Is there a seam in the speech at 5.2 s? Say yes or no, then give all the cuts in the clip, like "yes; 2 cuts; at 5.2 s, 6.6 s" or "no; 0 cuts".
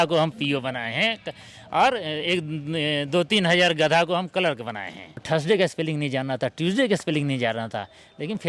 yes; 1 cut; at 5.2 s